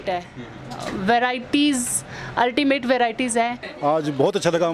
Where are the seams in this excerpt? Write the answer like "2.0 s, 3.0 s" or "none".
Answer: 3.6 s